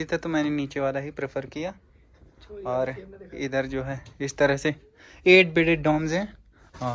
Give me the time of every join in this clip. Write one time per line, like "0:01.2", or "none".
none